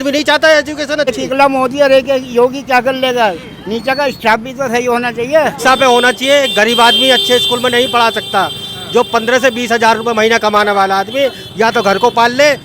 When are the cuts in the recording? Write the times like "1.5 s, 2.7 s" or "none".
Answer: 1.1 s, 5.6 s